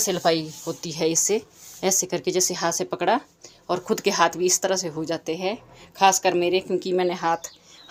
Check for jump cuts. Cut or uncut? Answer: uncut